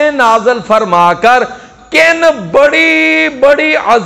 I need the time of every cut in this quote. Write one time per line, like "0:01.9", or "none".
none